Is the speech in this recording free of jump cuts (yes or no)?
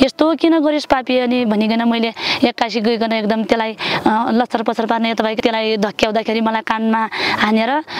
no